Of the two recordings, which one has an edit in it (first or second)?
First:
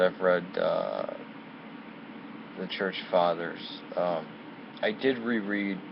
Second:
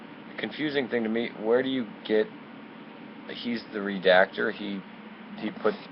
second